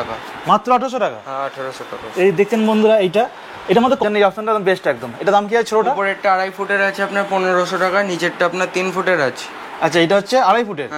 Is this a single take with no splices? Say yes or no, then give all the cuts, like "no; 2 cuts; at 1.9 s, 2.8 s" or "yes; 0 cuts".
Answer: no; 1 cut; at 4.0 s